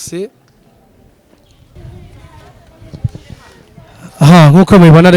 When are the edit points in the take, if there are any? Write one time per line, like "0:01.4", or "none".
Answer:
0:01.7